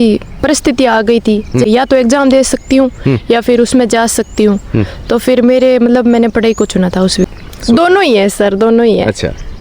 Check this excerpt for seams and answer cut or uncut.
cut